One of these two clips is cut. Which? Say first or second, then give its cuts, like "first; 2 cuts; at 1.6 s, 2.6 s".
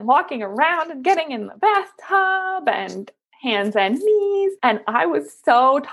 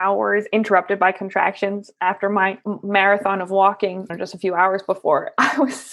second; 1 cut; at 4.0 s